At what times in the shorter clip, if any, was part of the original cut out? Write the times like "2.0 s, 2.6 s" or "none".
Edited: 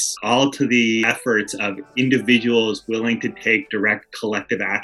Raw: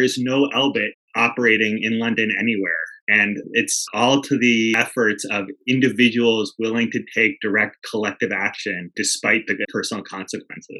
none

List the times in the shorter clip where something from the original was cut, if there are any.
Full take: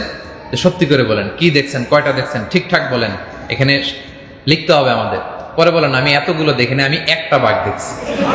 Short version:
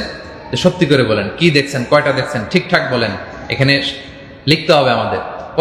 none

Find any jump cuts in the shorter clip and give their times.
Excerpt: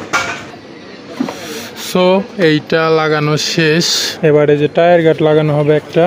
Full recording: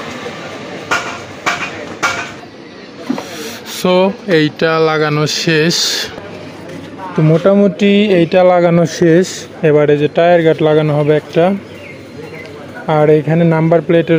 4.0 s

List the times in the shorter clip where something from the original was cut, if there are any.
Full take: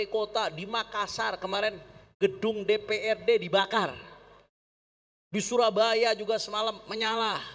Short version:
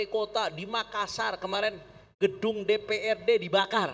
none

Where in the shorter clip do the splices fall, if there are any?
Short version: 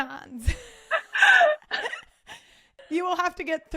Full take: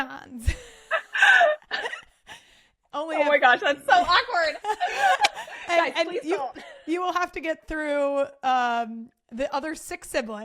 2.7 s

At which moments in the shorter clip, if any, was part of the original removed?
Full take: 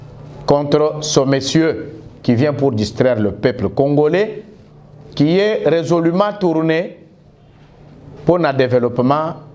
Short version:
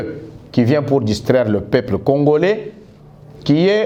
none

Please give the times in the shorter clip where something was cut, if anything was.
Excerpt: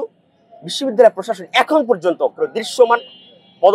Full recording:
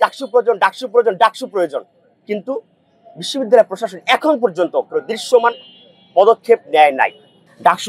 none

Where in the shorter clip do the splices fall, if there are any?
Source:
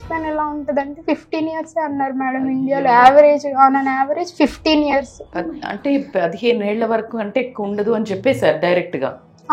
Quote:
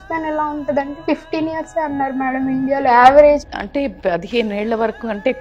3.5 s

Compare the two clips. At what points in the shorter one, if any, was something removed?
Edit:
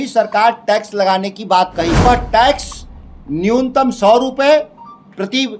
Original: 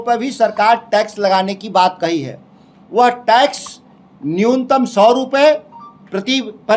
2.1 s

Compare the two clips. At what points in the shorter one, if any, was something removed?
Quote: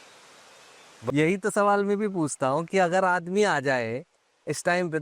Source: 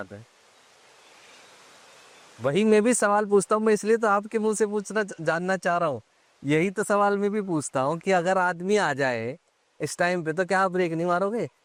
1.1 s

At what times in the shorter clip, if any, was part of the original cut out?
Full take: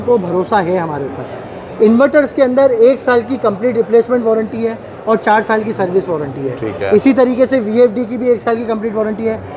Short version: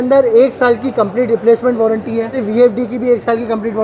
2.4 s

